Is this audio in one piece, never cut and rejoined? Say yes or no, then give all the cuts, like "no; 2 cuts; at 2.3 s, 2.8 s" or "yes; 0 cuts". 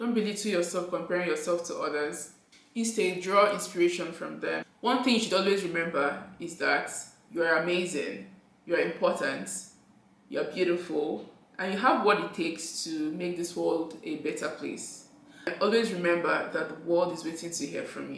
no; 2 cuts; at 4.7 s, 15.5 s